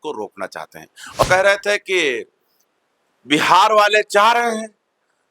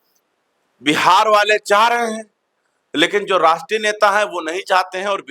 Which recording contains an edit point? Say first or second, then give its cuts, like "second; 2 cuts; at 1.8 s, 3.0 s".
first; 1 cut; at 1.2 s